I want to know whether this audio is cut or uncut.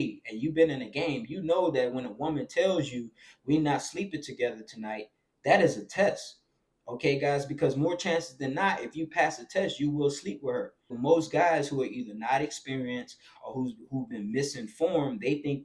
cut